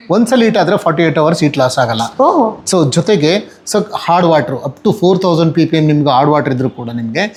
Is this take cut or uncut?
uncut